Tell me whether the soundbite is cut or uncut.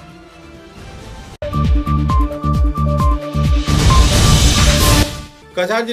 uncut